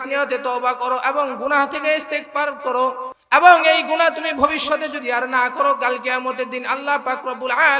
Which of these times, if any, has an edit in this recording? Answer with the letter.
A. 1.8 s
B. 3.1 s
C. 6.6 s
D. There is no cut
B